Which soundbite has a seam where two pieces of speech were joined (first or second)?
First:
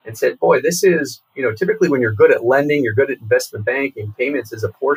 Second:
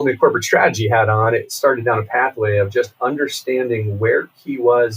second